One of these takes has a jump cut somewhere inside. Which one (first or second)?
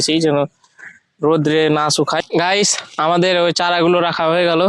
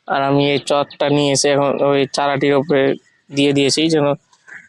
first